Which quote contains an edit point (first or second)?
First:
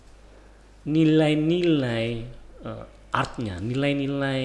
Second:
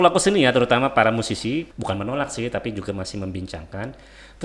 second